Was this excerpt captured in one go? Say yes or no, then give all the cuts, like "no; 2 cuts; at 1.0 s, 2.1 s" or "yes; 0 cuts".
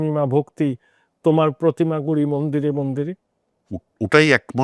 yes; 0 cuts